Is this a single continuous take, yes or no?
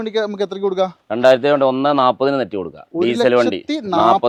yes